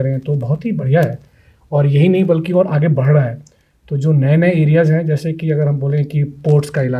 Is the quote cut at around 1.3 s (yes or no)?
no